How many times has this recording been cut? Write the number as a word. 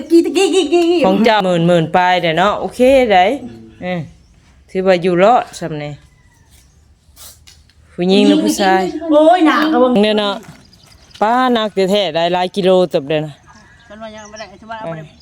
two